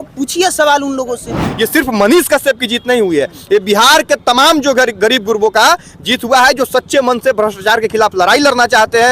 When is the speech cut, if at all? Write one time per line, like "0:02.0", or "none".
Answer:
0:01.5